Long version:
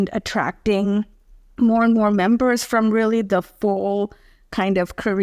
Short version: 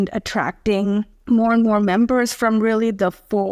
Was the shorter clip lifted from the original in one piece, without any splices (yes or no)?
no